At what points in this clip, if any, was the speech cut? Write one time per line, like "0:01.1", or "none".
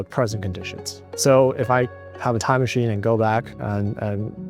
0:01.0